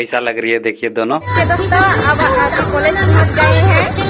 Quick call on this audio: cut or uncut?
cut